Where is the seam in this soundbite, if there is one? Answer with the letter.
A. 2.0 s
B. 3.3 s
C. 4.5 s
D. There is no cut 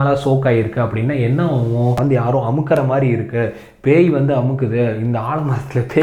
A